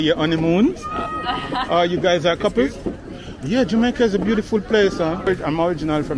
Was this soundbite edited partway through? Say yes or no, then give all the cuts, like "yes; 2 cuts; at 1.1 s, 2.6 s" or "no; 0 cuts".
yes; 1 cut; at 5.3 s